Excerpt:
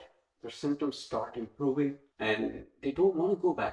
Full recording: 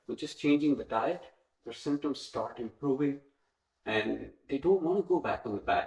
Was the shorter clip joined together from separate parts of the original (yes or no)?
yes